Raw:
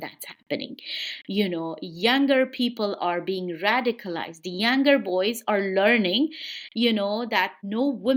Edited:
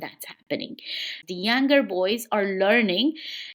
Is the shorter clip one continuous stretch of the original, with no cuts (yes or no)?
no